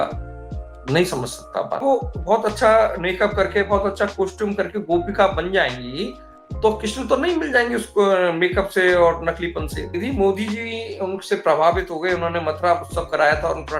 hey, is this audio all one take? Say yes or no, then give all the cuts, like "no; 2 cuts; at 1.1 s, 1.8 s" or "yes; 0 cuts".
no; 2 cuts; at 1.8 s, 9.9 s